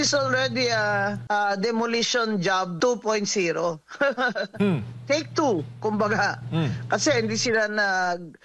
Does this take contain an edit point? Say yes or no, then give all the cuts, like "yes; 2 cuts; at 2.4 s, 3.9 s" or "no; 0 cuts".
yes; 2 cuts; at 1.2 s, 2.7 s